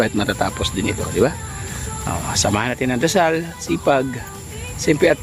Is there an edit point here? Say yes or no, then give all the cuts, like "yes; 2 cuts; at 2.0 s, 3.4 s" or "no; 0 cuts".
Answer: no; 0 cuts